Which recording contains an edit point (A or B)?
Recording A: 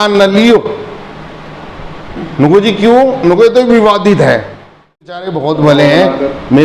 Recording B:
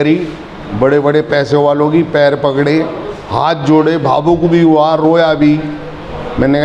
A